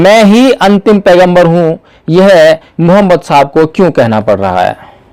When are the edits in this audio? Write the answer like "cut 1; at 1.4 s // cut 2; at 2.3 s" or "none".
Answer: none